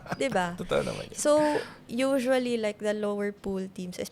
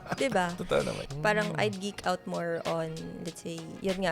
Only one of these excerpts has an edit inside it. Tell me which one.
second; 1 cut; at 1.1 s

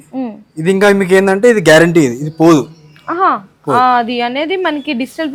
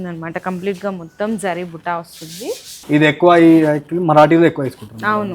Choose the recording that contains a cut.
second; 1 cut; at 2.7 s

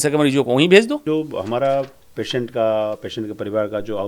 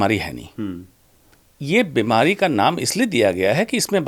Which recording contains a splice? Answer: first; 1 cut; at 1.0 s

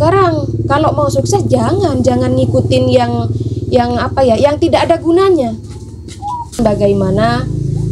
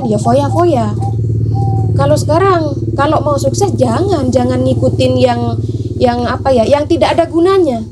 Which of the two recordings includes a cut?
first; 1 cut; at 6.6 s

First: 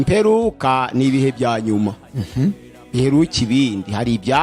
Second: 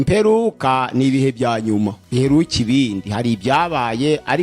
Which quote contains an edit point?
second; 1 cut; at 2.0 s

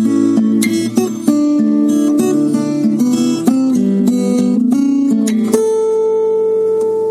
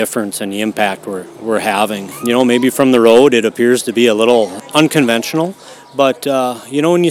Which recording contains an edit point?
second; 2 cuts; at 2.1 s, 4.6 s

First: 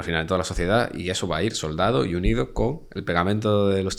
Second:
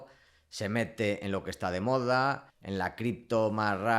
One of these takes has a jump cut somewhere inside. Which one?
second; 1 cut; at 2.5 s

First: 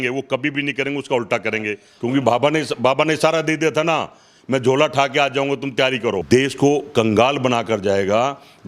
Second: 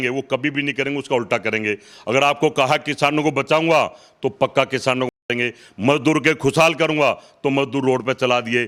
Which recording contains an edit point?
first; 2 cuts; at 1.9 s, 6.2 s

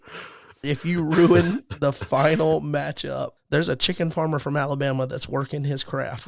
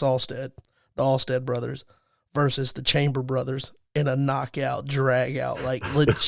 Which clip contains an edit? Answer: first; 1 cut; at 3.3 s

